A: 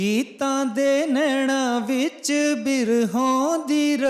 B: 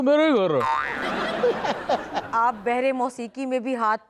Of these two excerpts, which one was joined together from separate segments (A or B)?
B